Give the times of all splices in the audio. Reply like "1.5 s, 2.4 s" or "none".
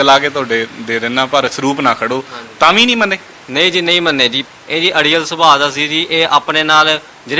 4.4 s